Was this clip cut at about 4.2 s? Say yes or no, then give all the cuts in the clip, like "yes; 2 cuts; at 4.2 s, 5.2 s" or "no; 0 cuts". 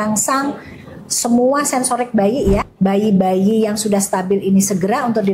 no; 1 cut; at 2.7 s